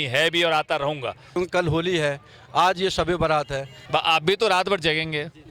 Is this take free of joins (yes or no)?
no